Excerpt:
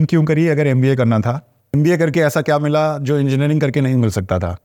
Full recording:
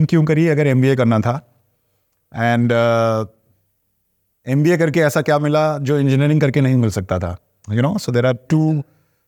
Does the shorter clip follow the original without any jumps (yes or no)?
no